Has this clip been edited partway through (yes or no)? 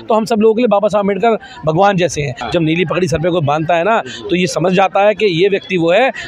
yes